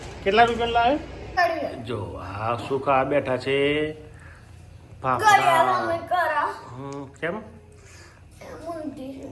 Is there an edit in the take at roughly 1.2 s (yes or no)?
yes